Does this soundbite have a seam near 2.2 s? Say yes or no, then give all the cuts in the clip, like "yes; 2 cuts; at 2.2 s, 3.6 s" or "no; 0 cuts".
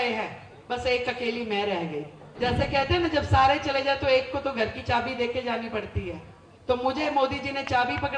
yes; 1 cut; at 2.2 s